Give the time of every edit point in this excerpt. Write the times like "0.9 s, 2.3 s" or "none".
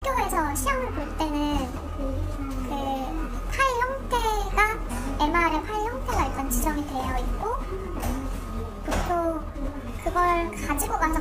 1.1 s